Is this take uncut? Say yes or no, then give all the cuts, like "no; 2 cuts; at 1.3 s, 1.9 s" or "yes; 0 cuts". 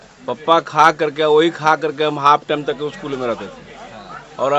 yes; 0 cuts